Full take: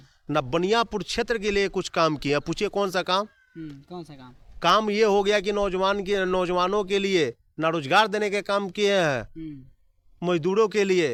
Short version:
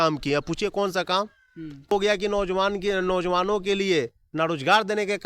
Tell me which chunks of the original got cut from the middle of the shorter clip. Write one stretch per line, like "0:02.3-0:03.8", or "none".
0:03.9-0:05.2